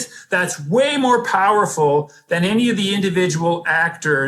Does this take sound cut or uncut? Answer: uncut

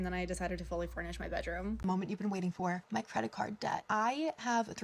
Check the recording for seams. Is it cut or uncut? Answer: cut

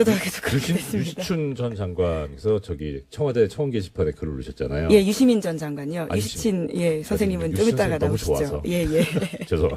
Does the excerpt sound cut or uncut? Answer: cut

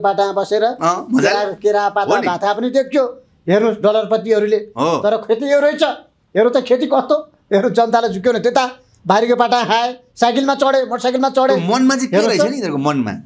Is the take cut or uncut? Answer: uncut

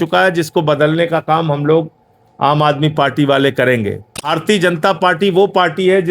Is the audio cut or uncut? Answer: cut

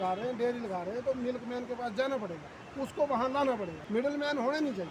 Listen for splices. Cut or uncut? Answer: cut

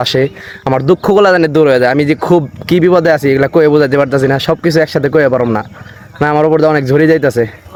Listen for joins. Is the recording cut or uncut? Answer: uncut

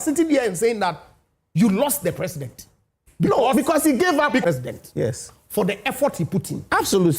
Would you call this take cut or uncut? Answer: cut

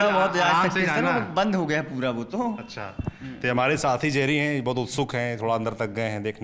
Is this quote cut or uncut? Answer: uncut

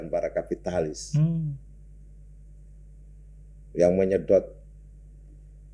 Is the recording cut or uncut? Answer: uncut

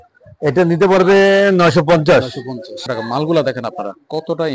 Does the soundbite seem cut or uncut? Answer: cut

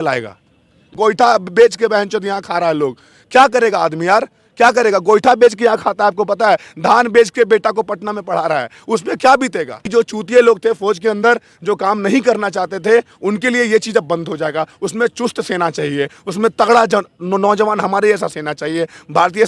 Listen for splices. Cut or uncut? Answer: cut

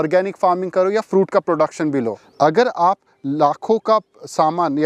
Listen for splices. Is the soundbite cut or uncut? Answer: cut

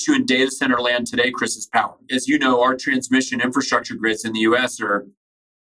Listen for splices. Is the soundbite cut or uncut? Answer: cut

